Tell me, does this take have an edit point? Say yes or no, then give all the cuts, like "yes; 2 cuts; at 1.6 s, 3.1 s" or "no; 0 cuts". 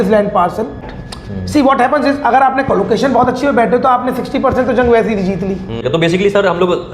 yes; 2 cuts; at 0.9 s, 5.8 s